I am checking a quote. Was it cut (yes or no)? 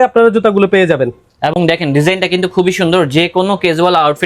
no